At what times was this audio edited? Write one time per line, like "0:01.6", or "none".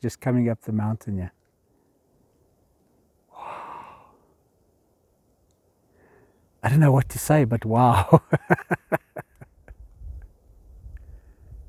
none